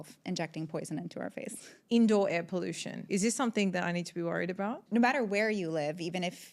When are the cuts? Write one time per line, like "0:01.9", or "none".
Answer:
0:01.7
0:03.0
0:04.8